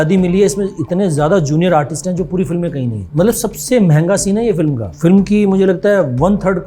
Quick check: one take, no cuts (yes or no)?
no